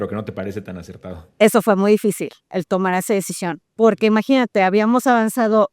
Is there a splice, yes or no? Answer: yes